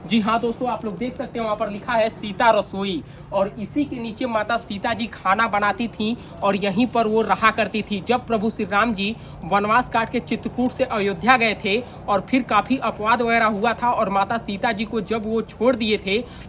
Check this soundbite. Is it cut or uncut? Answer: uncut